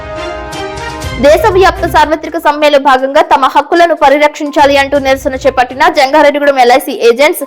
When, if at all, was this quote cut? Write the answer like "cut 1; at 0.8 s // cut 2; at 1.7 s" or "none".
cut 1; at 1.1 s